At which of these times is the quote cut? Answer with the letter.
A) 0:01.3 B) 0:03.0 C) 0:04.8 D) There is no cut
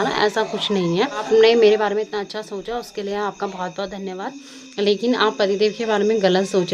A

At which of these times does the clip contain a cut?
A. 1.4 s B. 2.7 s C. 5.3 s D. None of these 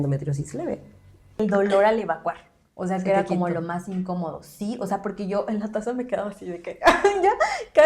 A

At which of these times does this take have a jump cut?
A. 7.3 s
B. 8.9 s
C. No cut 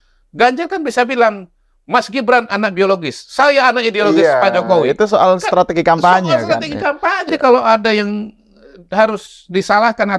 A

